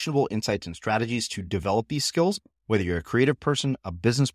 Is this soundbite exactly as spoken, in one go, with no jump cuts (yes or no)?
yes